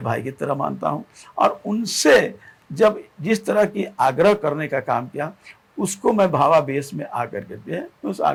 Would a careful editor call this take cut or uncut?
uncut